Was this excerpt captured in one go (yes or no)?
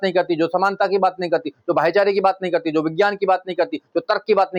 yes